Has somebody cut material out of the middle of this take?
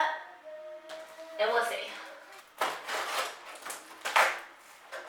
no; 0 cuts

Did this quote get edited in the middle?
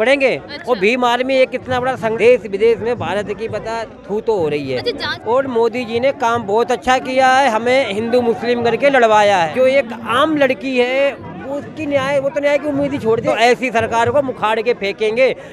yes; 4 cuts; at 2.2 s, 5.3 s, 9.5 s, 13.3 s

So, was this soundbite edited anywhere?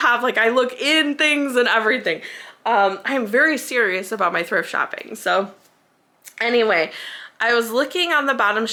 no; 0 cuts

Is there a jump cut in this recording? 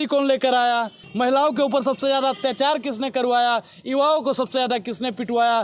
yes; 1 cut; at 1.0 s

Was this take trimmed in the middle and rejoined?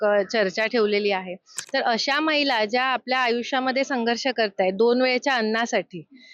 yes; 1 cut; at 1.5 s

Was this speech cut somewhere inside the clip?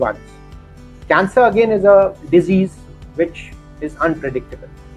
no; 0 cuts

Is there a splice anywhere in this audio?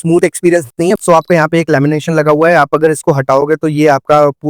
yes; 1 cut; at 1.0 s

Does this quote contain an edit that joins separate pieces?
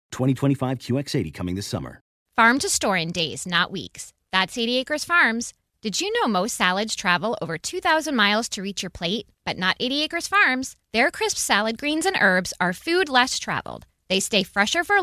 yes; 1 cut; at 2.2 s

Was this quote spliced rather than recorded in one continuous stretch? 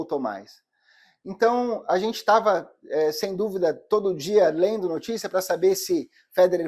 no; 0 cuts

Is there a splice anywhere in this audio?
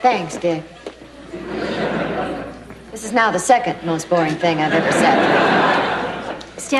yes; 1 cut; at 2.3 s

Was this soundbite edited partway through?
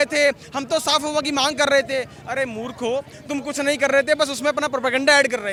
no; 0 cuts

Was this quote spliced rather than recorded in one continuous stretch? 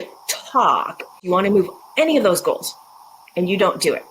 yes; 1 cut; at 1.2 s

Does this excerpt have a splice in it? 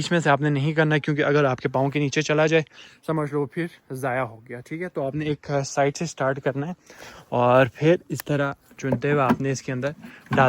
no; 0 cuts

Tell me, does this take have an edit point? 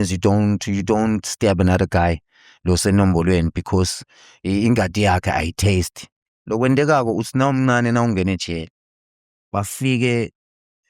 yes; 1 cut; at 6.2 s

